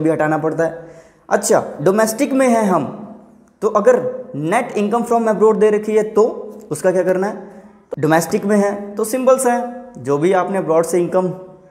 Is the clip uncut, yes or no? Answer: no